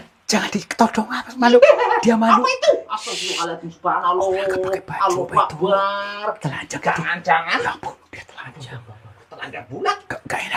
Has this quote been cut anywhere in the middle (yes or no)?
no